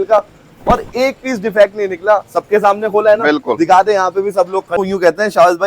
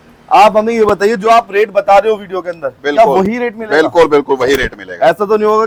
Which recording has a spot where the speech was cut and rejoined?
first; 1 cut; at 4.8 s

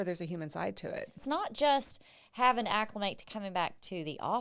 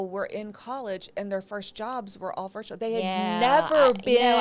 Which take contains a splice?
first; 1 cut; at 1.2 s

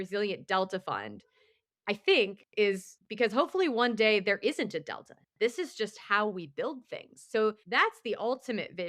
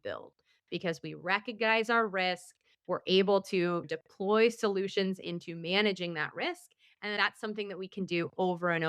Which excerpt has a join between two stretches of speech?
first; 1 cut; at 7.6 s

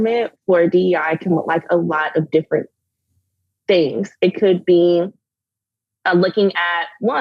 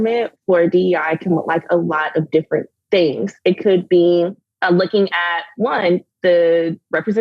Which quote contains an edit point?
second; 2 cuts; at 2.7 s, 4.5 s

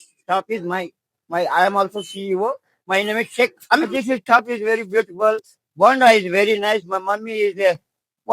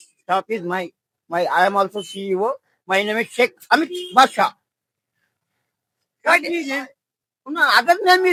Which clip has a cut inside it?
first; 1 cut; at 3.9 s

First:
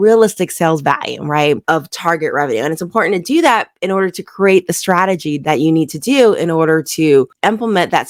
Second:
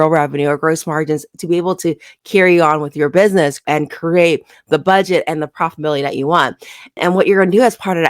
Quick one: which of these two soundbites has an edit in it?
second; 1 cut; at 3.6 s

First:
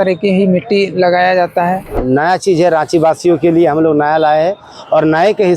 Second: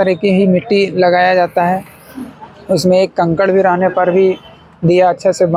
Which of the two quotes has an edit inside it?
first; 1 cut; at 2.0 s

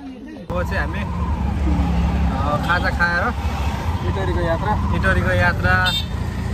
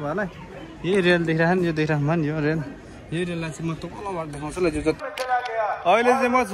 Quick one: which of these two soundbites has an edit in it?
second; 1 cut; at 5.0 s

